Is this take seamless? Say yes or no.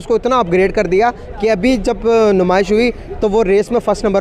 yes